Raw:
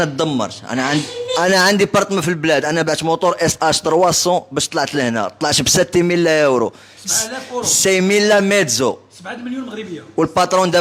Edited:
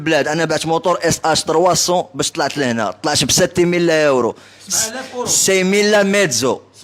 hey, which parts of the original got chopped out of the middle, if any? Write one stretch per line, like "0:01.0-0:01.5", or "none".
none